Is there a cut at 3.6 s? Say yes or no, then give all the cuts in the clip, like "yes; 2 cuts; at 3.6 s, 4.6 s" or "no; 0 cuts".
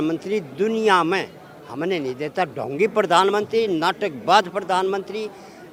no; 0 cuts